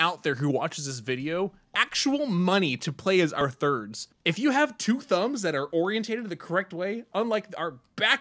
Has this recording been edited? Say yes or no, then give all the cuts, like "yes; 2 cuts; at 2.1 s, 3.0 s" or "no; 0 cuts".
yes; 1 cut; at 3.6 s